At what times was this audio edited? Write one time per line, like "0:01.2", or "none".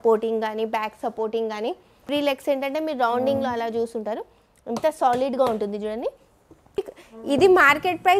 0:02.1
0:06.9

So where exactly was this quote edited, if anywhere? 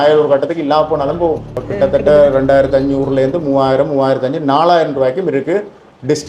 0:01.7

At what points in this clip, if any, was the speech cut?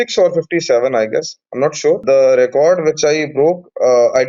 0:02.0

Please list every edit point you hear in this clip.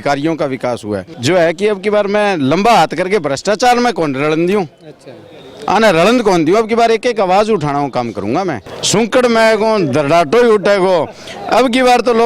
0:01.1
0:08.7

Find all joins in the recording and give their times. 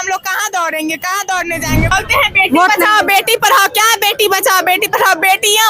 0:01.9

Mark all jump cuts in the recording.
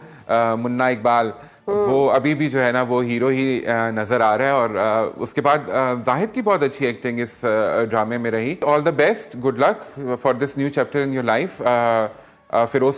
0:08.6

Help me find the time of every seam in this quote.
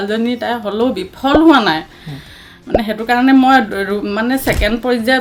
none

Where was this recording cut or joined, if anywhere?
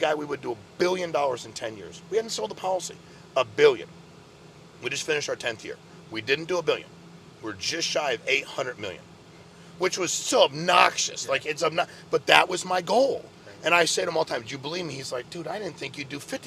none

